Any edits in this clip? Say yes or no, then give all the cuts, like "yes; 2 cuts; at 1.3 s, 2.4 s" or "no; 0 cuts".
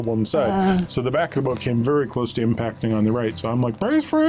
no; 0 cuts